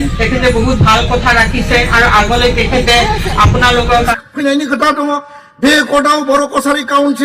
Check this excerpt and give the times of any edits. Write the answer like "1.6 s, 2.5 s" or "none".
4.1 s